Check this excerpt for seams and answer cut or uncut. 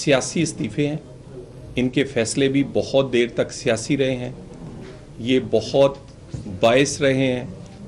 uncut